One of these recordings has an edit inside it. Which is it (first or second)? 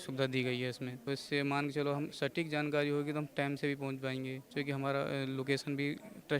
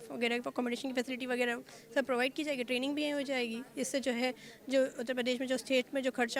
first